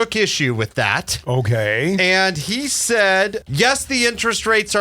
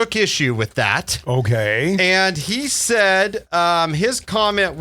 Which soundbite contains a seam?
first; 1 cut; at 3.4 s

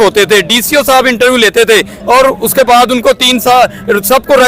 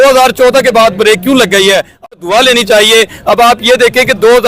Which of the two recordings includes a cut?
second; 1 cut; at 1.9 s

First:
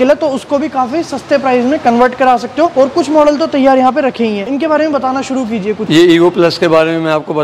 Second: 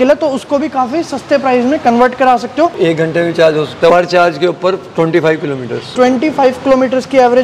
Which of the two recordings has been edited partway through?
second; 2 cuts; at 2.7 s, 3.9 s

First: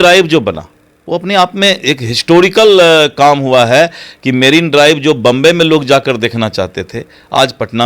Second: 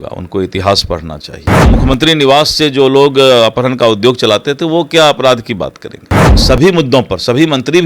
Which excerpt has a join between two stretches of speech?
second; 2 cuts; at 1.7 s, 6.4 s

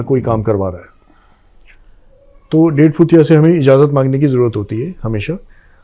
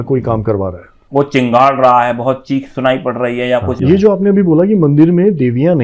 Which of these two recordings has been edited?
second; 2 cuts; at 0.9 s, 3.8 s

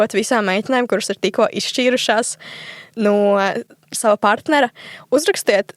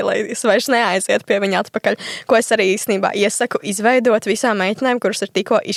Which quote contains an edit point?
first; 1 cut; at 4.0 s

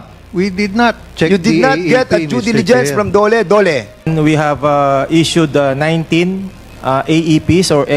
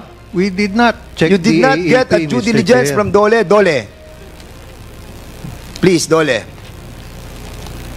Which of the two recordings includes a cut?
first; 1 cut; at 4.1 s

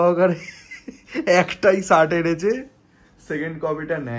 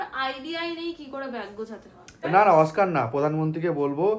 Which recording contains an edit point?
second; 1 cut; at 2.1 s

